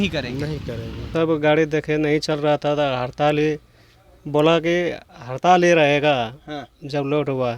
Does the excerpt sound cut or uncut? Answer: cut